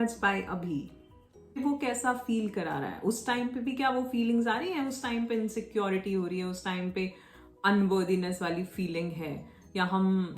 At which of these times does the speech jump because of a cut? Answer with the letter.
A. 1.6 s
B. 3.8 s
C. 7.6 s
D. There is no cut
A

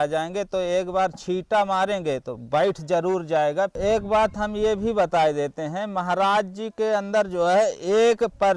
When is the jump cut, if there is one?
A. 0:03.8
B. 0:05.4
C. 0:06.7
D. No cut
A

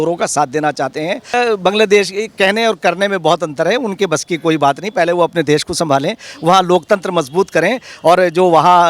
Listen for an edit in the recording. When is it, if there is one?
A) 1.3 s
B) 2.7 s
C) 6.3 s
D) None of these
A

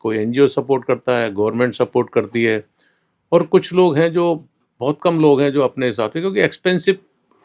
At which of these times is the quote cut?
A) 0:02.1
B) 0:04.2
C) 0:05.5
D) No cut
D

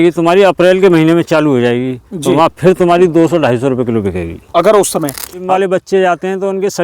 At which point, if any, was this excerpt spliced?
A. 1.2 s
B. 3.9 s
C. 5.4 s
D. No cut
C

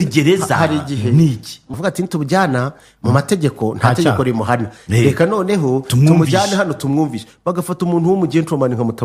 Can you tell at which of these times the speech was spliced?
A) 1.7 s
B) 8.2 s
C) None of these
A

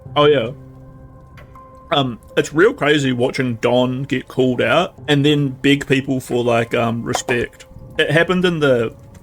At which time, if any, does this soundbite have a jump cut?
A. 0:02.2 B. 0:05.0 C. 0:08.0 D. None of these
B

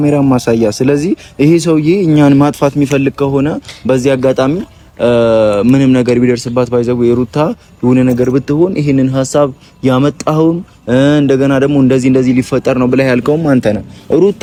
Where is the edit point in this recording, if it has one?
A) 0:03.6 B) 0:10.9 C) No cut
C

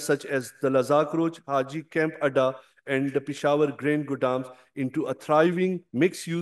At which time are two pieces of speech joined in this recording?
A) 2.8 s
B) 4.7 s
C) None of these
C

